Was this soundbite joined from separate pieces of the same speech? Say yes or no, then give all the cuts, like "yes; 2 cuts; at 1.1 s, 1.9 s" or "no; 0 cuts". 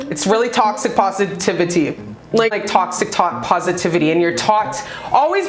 yes; 1 cut; at 2.5 s